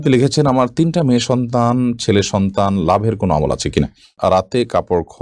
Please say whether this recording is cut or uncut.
cut